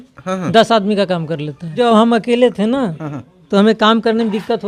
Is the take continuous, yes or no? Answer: no